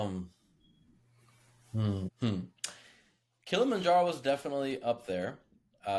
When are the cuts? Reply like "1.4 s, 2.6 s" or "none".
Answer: 2.1 s